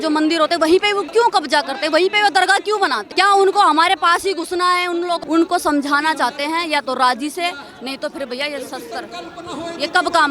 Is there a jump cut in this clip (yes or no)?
yes